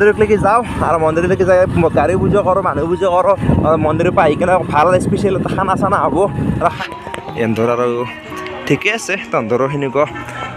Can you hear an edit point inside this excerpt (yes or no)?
yes